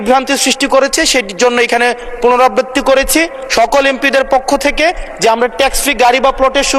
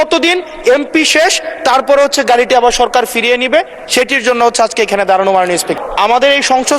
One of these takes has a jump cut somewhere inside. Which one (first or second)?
second